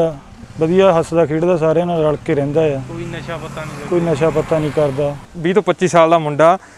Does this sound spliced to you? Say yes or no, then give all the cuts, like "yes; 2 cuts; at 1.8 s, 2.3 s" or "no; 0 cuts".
yes; 1 cut; at 5.3 s